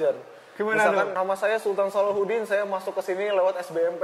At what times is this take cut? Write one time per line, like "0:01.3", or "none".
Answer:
0:01.1